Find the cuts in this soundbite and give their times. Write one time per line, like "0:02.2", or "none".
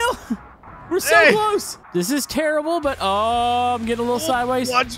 0:01.8